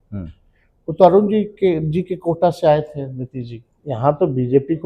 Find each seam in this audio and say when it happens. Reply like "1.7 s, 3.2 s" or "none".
3.8 s